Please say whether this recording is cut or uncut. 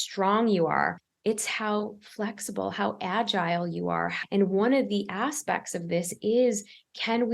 cut